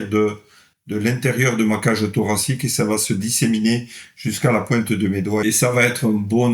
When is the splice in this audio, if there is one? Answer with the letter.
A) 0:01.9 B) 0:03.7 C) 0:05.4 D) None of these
C